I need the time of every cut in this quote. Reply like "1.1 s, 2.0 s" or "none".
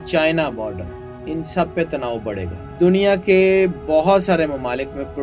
2.6 s